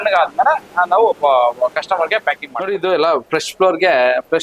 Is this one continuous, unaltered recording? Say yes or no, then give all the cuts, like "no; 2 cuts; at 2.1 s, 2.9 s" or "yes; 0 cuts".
no; 1 cut; at 2.5 s